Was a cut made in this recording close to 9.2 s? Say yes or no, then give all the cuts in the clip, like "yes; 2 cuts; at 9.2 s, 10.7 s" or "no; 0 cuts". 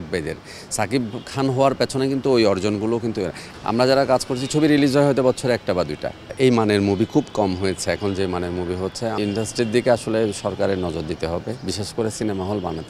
yes; 3 cuts; at 3.4 s, 6.3 s, 9.2 s